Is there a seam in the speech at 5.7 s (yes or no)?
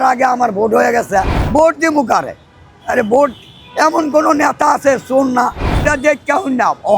yes